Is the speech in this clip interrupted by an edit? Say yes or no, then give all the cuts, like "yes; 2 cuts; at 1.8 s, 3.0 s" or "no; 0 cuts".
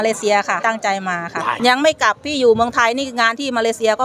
yes; 1 cut; at 1.5 s